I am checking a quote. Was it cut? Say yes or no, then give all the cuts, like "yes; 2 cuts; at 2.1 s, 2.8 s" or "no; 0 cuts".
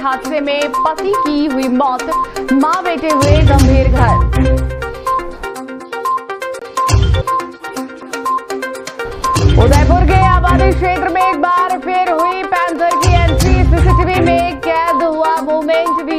no; 0 cuts